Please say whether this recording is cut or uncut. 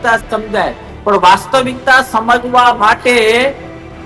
uncut